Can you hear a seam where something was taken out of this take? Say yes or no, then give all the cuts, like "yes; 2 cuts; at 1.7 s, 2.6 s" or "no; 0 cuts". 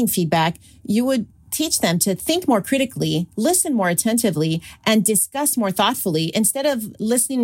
yes; 1 cut; at 1.3 s